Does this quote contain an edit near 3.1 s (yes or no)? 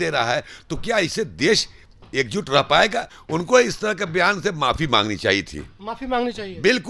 yes